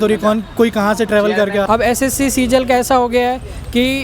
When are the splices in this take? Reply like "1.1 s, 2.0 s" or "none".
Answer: 1.7 s

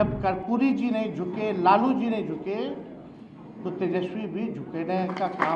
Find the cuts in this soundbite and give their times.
none

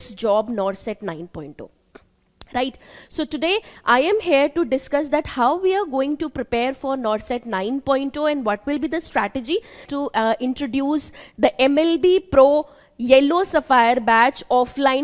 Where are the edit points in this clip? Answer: 9.9 s

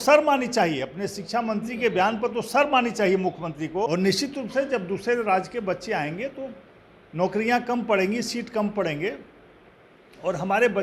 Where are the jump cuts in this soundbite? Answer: 3.9 s

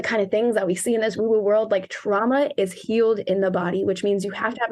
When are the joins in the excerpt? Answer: none

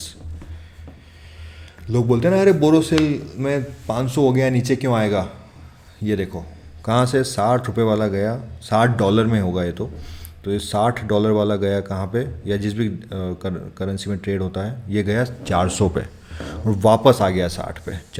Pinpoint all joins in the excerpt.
none

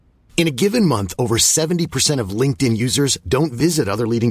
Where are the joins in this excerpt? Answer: none

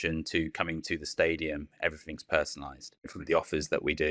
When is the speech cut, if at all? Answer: 3.2 s

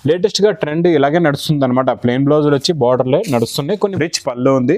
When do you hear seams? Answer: 3.7 s

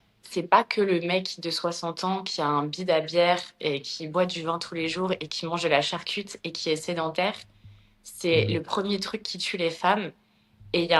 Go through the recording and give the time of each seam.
none

